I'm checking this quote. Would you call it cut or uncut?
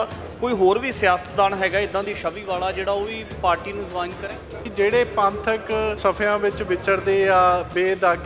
cut